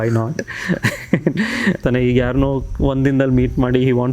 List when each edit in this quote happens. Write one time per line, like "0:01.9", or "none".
0:01.8